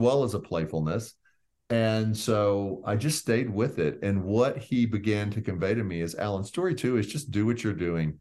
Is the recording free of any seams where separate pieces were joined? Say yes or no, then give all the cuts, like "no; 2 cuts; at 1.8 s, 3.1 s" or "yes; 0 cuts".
yes; 0 cuts